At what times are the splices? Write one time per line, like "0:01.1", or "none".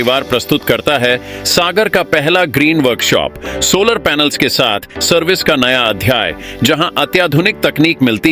none